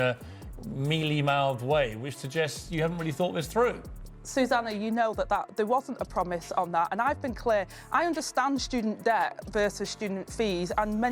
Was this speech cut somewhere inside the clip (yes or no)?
yes